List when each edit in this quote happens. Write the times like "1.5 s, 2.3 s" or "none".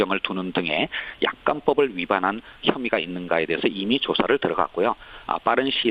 4.5 s